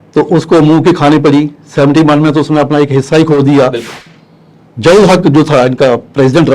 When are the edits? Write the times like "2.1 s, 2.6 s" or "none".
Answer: 4.0 s